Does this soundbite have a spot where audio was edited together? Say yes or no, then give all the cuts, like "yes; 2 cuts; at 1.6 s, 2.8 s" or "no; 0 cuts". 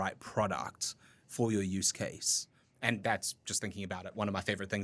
yes; 1 cut; at 3.0 s